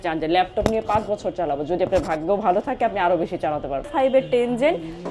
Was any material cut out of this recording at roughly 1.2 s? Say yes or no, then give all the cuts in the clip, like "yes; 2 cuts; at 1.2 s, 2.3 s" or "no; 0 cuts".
no; 1 cut; at 3.9 s